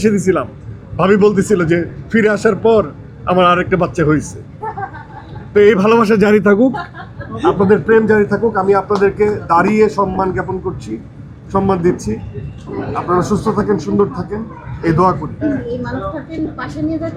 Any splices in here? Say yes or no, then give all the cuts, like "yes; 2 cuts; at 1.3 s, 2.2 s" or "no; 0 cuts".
no; 0 cuts